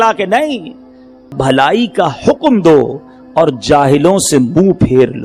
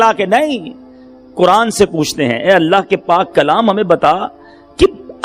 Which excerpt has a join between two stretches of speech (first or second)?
first